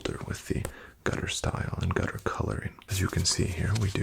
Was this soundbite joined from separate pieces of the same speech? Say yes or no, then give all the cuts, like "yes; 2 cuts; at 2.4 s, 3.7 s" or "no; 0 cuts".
yes; 1 cut; at 2.8 s